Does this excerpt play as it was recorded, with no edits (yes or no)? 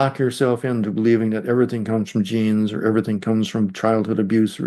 yes